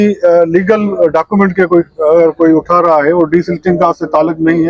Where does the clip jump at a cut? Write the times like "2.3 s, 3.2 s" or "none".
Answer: none